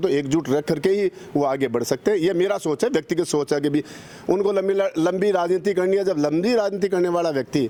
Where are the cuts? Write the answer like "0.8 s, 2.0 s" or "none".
none